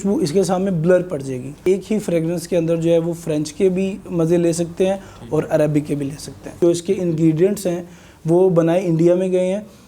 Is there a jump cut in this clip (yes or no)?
yes